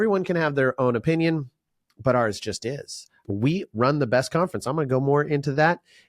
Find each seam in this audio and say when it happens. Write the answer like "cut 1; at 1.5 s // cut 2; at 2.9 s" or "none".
cut 1; at 3.2 s